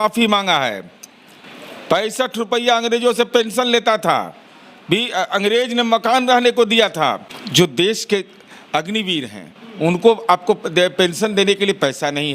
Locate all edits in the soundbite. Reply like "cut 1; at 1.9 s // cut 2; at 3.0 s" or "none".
cut 1; at 7.3 s